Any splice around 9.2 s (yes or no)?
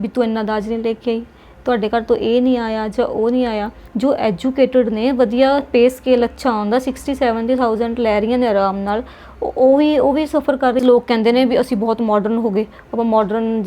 no